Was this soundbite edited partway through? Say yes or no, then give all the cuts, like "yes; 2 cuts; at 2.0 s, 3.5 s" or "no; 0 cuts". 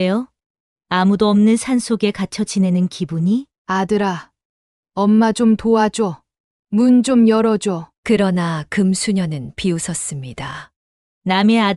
yes; 1 cut; at 3.5 s